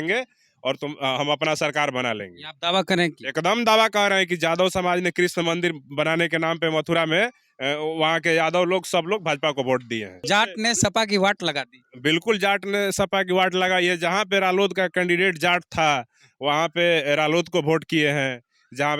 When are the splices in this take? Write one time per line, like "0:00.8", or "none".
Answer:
0:10.2

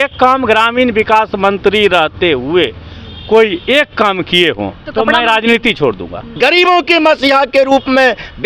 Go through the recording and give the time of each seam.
0:04.8
0:06.2

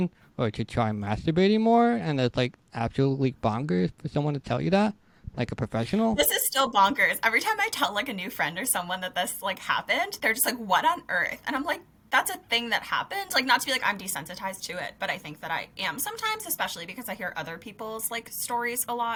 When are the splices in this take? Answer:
none

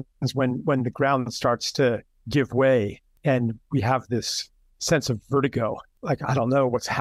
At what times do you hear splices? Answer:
0:03.0
0:05.9

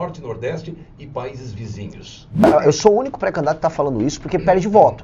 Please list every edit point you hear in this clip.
0:02.4

